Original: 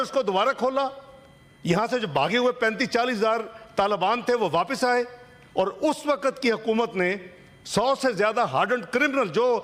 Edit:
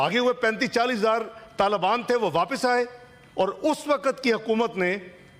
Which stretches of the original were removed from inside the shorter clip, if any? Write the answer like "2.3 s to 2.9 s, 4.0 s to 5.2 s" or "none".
none